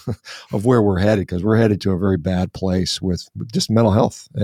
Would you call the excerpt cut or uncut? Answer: uncut